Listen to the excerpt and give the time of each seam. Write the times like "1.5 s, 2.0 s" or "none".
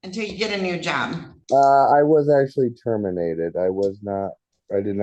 1.3 s